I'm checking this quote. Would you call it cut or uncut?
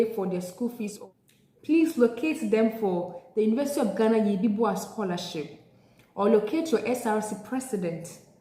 cut